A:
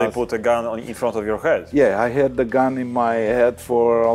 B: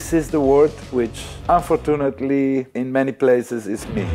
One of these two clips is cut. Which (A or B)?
B